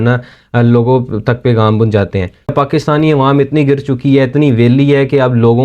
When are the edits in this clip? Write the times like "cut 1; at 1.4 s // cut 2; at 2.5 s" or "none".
cut 1; at 2.5 s